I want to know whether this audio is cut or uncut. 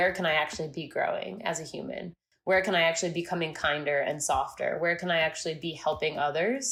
uncut